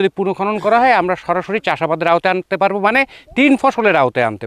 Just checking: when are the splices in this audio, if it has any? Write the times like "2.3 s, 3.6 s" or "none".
none